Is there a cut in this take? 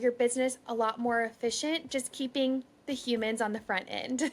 no; 0 cuts

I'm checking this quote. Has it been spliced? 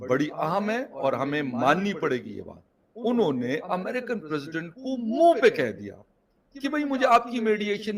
yes; 1 cut; at 2.8 s

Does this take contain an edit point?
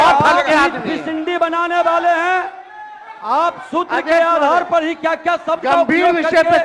no; 0 cuts

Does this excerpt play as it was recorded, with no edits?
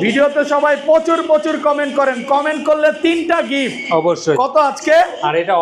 yes; 0 cuts

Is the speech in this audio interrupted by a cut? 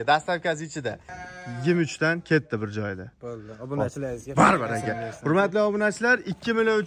yes; 1 cut; at 1.1 s

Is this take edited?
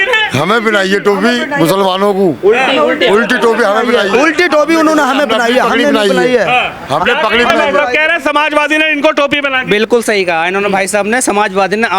no; 0 cuts

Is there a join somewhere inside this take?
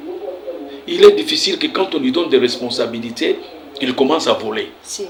no; 0 cuts

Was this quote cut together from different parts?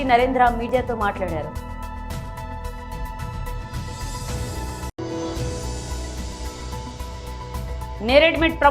yes; 4 cuts; at 1.5 s, 3.0 s, 4.7 s, 6.4 s

